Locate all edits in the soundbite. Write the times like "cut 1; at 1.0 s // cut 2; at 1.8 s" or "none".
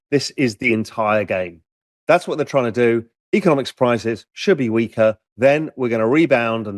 none